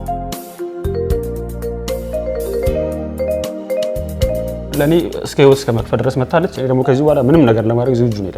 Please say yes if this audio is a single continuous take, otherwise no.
no